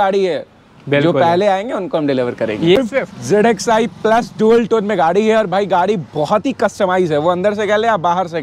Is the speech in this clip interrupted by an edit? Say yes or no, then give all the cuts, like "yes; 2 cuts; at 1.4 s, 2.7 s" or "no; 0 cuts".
yes; 1 cut; at 2.7 s